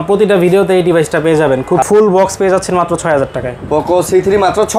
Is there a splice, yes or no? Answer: yes